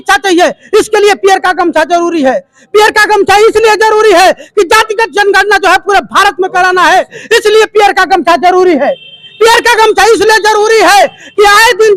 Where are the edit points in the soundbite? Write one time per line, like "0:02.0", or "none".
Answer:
none